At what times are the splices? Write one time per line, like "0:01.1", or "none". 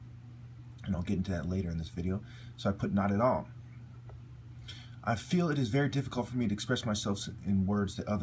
0:07.3